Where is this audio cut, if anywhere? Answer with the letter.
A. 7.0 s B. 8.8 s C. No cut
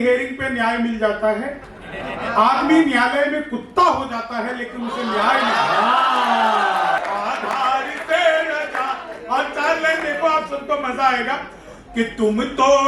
A